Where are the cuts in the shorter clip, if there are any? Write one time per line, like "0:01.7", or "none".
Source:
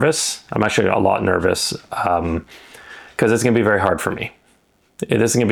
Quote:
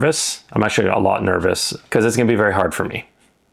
0:01.7